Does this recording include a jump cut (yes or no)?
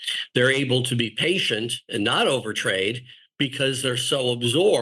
no